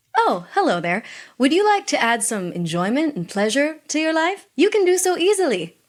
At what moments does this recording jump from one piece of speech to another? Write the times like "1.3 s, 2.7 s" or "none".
none